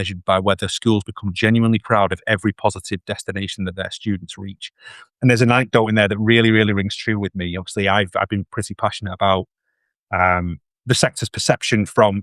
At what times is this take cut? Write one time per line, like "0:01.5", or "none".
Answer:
none